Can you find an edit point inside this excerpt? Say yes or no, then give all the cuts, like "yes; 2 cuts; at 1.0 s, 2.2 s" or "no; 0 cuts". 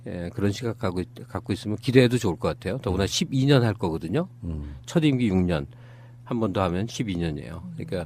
no; 0 cuts